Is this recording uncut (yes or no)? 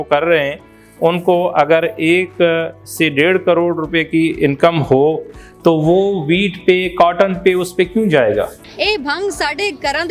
no